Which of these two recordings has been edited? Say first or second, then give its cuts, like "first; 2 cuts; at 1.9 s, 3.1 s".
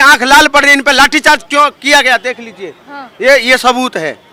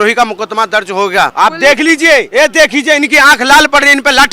second; 2 cuts; at 1.3 s, 2.3 s